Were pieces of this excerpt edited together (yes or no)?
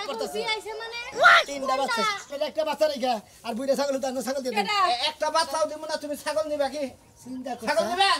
yes